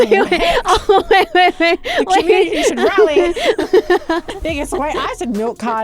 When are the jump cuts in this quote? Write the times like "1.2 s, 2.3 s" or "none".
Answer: 4.3 s